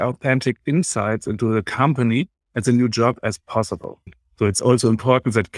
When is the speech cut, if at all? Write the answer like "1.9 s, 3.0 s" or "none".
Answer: 4.0 s